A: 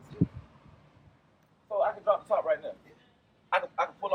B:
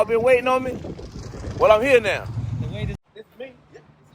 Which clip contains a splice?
B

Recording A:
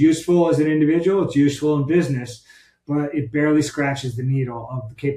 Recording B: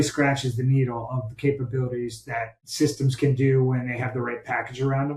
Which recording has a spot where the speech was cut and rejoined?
B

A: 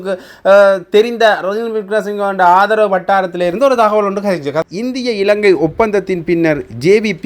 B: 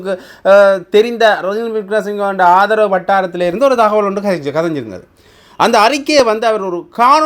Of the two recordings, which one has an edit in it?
A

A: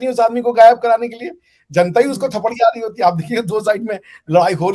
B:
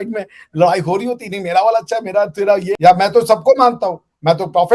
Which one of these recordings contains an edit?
B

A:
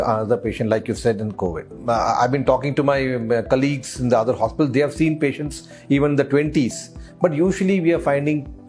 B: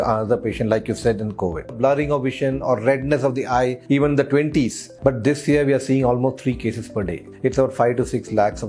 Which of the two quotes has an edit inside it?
B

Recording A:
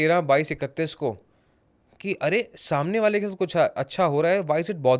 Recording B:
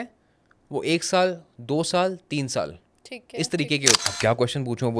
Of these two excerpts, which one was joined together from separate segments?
B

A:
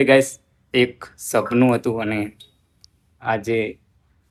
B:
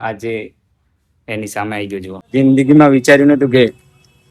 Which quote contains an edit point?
B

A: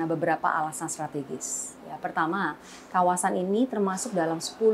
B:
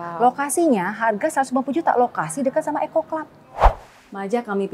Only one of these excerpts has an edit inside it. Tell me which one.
B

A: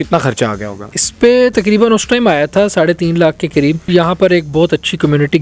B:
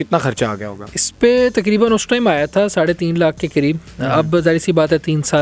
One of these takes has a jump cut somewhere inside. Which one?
A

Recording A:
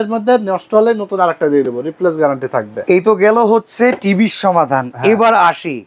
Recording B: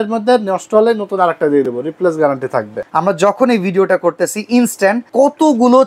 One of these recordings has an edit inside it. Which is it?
B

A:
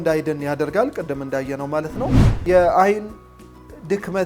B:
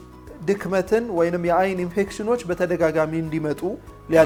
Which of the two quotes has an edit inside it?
A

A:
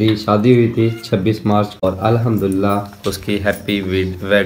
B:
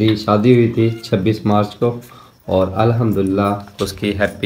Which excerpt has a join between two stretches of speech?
A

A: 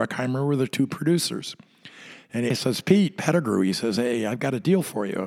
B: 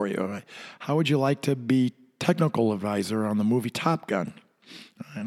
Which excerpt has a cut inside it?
A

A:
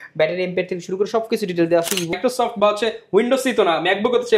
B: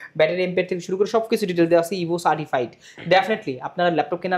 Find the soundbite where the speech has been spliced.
A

